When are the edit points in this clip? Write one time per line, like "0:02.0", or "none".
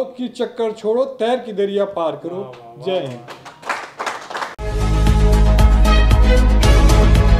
none